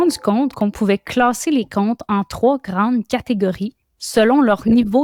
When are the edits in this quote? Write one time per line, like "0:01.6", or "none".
none